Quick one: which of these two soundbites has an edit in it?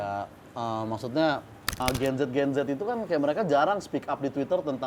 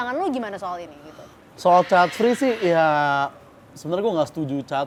first; 1 cut; at 1.8 s

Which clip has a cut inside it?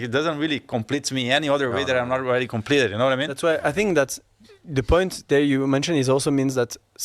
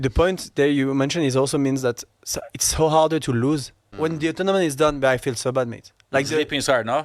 second; 1 cut; at 3.9 s

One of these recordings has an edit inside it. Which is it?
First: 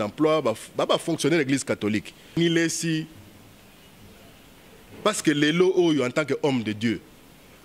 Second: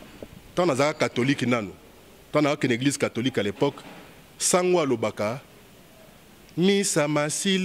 first; 1 cut; at 2.4 s

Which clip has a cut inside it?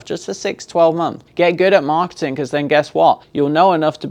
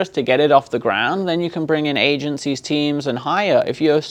first; 2 cuts; at 1.2 s, 3.3 s

